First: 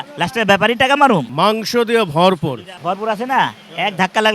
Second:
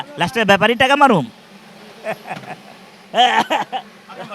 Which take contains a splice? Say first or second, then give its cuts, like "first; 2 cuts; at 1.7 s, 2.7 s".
first; 2 cuts; at 1.3 s, 2.7 s